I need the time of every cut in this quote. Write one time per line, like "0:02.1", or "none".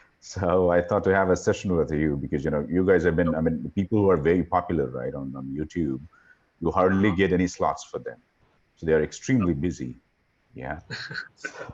none